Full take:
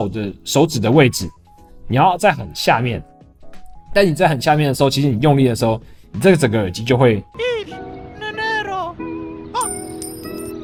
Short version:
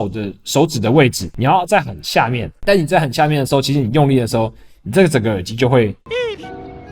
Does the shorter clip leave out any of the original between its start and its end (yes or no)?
yes